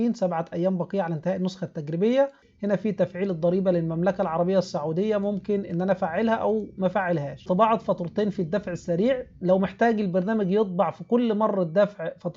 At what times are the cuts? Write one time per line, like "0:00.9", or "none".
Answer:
0:02.5
0:07.4